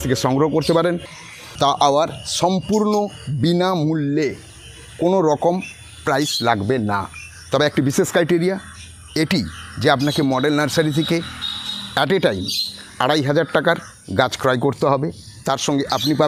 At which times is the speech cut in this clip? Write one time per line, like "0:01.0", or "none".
0:01.4